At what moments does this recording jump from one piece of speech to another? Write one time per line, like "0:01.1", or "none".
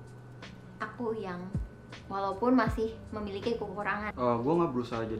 0:04.3